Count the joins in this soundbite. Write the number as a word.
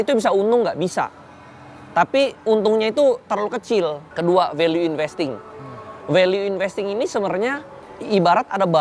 two